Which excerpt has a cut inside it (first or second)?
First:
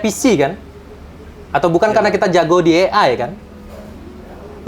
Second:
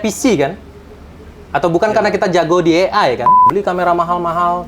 second